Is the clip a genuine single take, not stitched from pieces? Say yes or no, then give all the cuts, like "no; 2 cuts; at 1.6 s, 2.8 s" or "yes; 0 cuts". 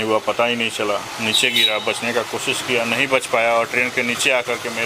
yes; 0 cuts